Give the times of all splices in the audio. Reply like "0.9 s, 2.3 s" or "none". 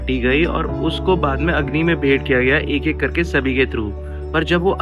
none